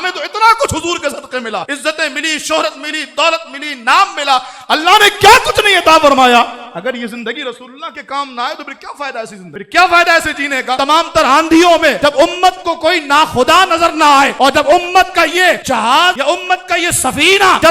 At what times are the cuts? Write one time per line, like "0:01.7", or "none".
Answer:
0:10.8